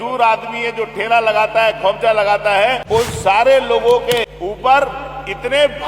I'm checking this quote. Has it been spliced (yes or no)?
yes